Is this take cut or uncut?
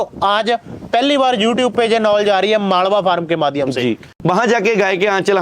cut